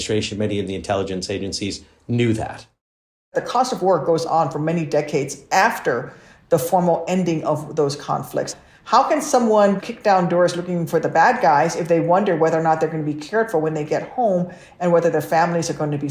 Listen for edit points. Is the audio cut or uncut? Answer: cut